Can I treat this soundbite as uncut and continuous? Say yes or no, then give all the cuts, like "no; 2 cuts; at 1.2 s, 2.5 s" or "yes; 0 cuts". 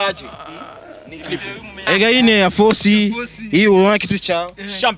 no; 1 cut; at 1.8 s